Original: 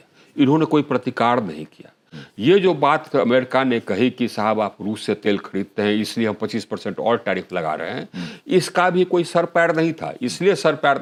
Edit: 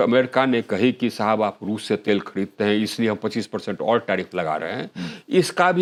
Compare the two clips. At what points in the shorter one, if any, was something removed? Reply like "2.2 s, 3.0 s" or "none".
none